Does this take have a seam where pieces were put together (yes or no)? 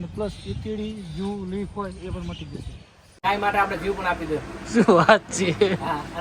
yes